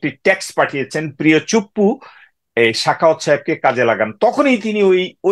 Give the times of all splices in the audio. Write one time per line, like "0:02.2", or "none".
none